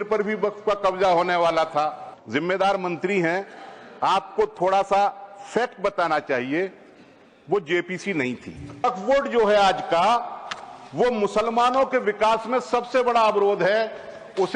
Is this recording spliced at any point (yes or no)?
yes